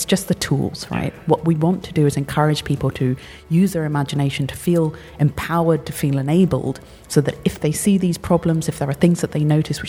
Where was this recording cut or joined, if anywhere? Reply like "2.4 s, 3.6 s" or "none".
6.9 s